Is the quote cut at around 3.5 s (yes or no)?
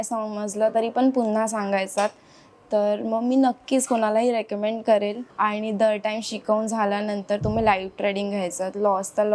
no